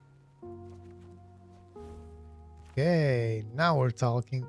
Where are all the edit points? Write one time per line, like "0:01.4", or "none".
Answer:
0:02.7